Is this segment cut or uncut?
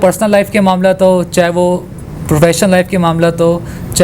uncut